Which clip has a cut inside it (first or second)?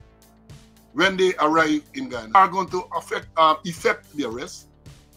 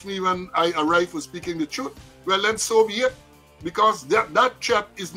first